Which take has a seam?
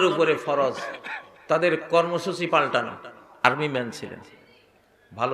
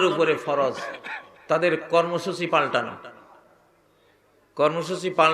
first; 1 cut; at 3.4 s

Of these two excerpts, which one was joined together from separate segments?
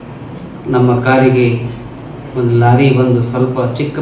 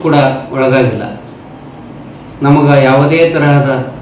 first; 1 cut; at 1.5 s

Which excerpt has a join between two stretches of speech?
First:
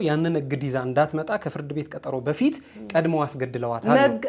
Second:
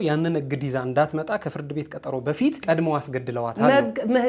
second; 1 cut; at 2.6 s

